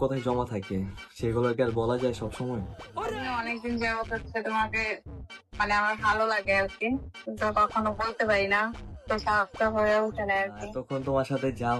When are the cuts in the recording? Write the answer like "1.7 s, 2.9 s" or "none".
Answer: 3.1 s, 10.7 s